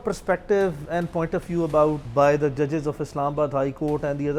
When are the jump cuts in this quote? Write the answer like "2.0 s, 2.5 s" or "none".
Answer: 2.0 s

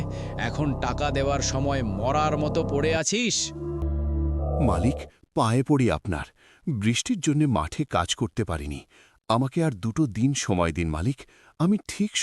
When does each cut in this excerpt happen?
3.8 s

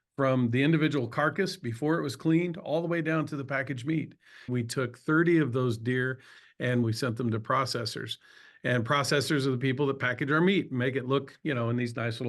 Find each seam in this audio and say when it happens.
4.5 s, 6.8 s

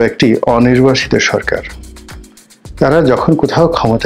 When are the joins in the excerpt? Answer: none

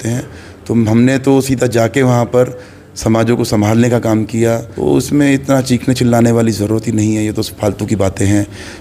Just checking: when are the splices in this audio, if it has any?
4.7 s

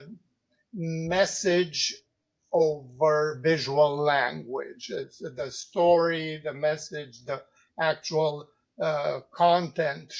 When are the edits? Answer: none

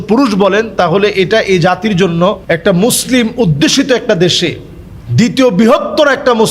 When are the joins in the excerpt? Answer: 2.4 s

